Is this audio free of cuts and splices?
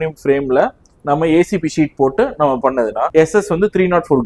no; 1 cut; at 3.1 s

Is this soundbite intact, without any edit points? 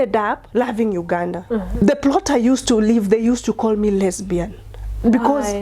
no; 1 cut; at 1.7 s

